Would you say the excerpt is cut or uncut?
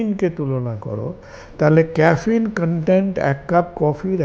uncut